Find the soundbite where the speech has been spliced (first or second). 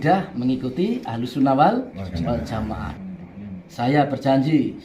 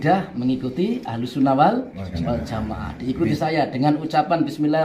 first